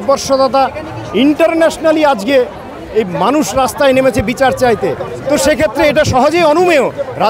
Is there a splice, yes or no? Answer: no